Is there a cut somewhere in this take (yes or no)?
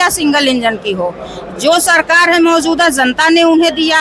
no